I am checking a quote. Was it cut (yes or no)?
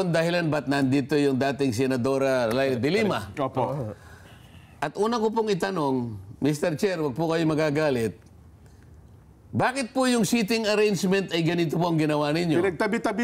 no